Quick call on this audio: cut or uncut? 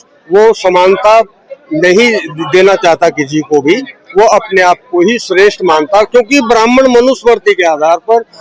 uncut